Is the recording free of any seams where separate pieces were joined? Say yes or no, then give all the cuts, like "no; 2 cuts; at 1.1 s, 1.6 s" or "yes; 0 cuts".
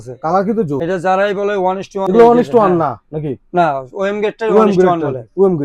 yes; 0 cuts